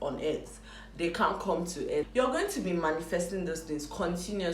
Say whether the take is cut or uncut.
cut